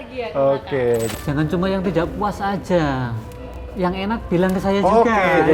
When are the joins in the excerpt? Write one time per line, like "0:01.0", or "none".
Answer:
0:01.1